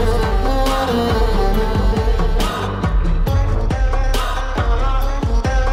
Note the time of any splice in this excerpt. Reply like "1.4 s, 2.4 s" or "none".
none